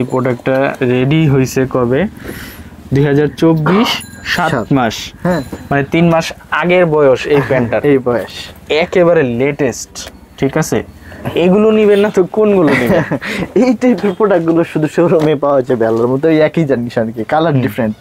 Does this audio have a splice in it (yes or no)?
no